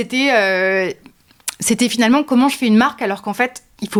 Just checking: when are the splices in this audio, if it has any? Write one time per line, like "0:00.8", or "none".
none

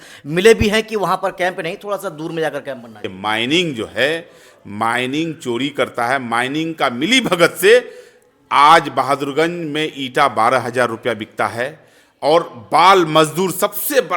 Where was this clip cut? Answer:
0:03.1

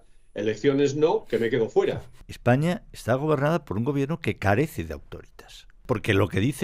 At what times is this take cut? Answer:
0:02.2
0:05.8

